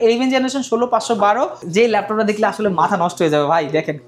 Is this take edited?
yes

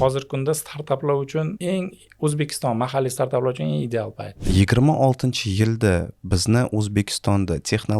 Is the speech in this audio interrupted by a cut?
yes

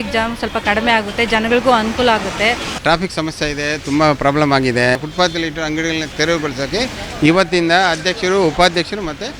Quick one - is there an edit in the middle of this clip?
yes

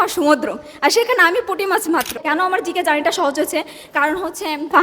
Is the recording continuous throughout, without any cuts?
no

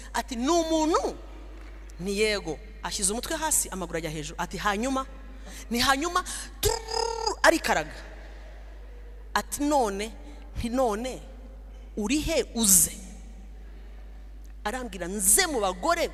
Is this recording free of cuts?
yes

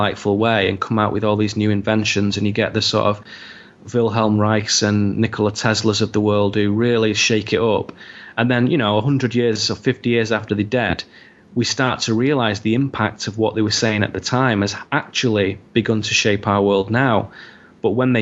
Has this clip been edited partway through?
yes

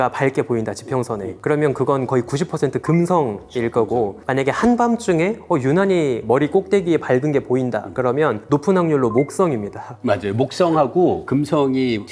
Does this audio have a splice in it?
no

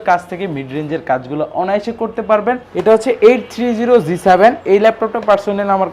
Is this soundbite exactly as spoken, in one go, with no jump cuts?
no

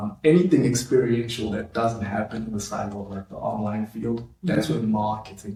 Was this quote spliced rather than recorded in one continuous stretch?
no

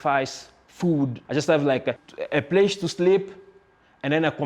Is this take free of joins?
no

